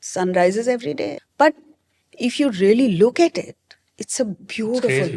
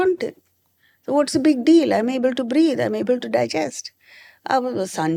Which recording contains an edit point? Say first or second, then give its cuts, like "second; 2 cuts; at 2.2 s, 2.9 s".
first; 1 cut; at 1.2 s